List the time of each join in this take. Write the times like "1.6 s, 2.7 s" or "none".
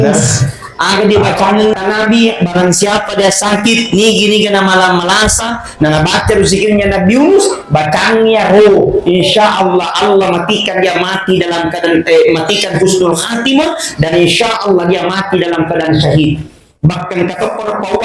1.7 s